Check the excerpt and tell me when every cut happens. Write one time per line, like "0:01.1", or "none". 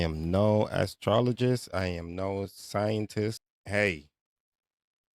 0:03.5